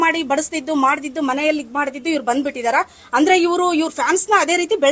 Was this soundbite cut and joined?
no; 0 cuts

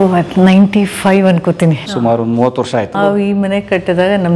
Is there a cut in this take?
yes; 2 cuts; at 1.9 s, 3.0 s

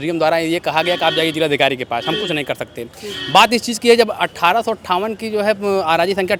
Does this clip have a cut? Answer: no; 0 cuts

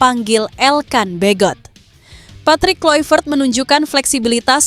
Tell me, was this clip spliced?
no; 0 cuts

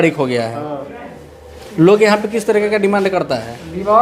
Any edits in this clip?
no; 0 cuts

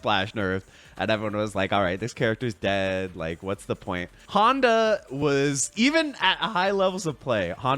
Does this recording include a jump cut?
yes; 1 cut; at 4.2 s

